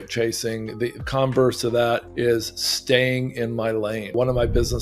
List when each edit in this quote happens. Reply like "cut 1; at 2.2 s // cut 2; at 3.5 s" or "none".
cut 1; at 1.0 s // cut 2; at 2.1 s // cut 3; at 4.1 s